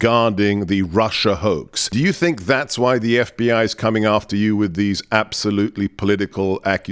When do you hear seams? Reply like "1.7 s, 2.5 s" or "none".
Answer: 1.8 s